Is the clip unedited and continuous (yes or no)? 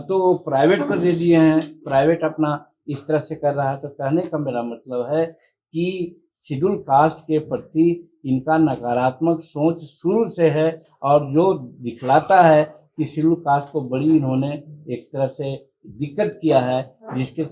yes